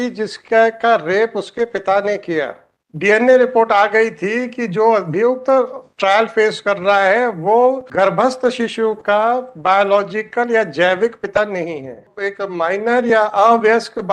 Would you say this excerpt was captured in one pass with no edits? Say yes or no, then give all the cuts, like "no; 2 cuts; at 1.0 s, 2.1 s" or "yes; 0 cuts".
no; 3 cuts; at 2.7 s, 7.8 s, 12.2 s